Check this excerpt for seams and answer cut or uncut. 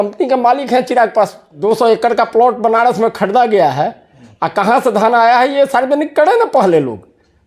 cut